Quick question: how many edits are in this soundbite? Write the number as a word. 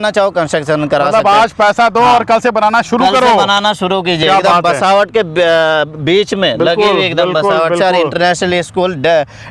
zero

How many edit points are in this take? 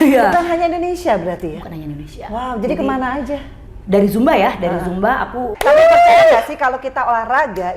one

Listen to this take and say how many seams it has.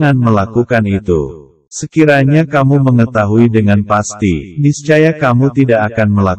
zero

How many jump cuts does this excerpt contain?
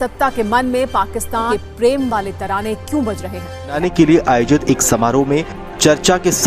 two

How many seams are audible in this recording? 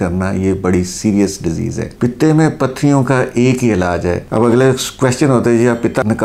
one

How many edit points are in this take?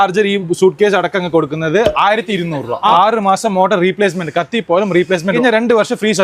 two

